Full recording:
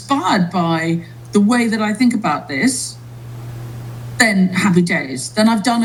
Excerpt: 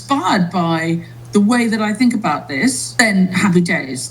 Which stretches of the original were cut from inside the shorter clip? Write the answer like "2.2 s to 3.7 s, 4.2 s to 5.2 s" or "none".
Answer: 2.8 s to 4.1 s